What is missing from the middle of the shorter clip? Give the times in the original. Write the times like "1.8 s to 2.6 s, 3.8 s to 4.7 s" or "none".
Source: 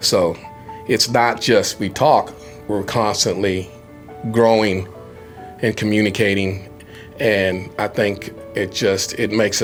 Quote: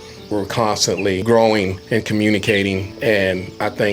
3.6 s to 4.3 s, 4.9 s to 5.5 s, 6.6 s to 7.1 s